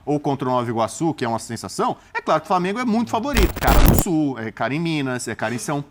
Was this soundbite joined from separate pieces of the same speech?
yes; 1 cut; at 3.6 s

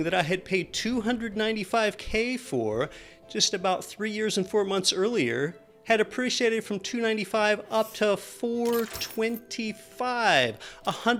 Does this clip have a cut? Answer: no; 0 cuts

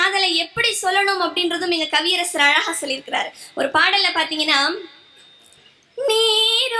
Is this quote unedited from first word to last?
yes; 0 cuts

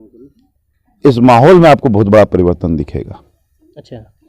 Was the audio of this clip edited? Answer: no; 0 cuts

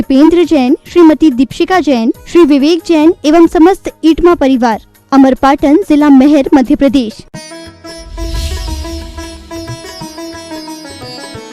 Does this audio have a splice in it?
yes; 1 cut; at 7.3 s

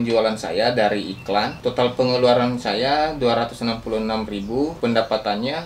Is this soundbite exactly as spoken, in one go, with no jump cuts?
no; 2 cuts; at 1.5 s, 4.7 s

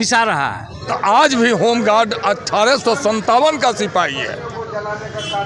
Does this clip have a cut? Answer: yes; 1 cut; at 0.9 s

